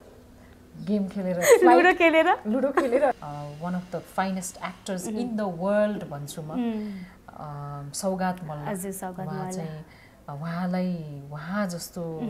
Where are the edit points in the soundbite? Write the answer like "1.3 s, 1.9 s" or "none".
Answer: 3.2 s